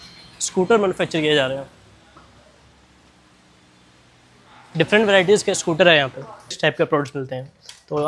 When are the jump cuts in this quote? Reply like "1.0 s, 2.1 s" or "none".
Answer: 6.6 s